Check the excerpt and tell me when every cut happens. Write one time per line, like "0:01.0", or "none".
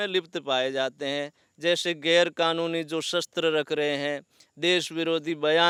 none